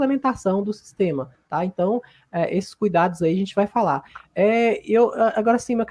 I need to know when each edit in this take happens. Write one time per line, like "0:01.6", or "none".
none